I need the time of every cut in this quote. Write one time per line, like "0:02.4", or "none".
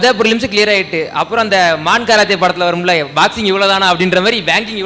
none